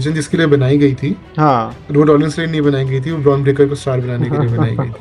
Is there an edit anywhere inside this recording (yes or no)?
no